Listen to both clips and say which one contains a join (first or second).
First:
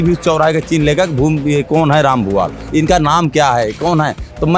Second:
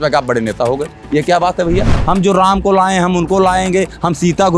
second